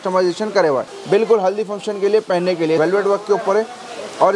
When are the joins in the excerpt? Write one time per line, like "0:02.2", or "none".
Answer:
0:00.9
0:02.8